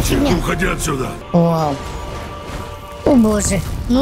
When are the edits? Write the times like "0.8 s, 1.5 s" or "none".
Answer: 1.2 s